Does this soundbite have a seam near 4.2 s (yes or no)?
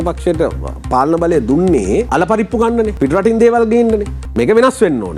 yes